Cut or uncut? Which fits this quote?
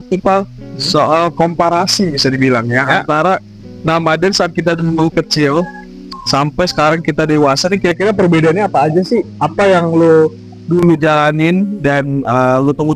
uncut